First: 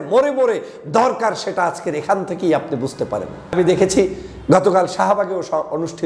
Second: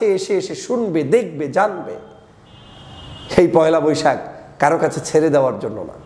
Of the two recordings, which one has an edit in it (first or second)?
first